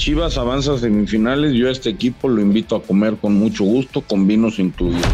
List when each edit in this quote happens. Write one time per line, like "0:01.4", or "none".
none